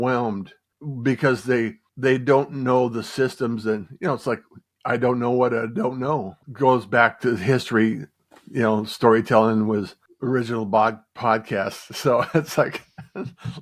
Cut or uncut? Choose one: cut